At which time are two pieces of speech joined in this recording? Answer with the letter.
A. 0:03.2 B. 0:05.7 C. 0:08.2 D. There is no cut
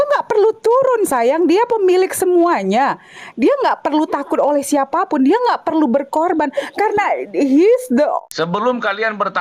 C